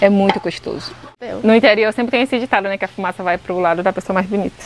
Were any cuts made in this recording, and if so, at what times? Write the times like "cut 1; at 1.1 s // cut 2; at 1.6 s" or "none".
cut 1; at 1.2 s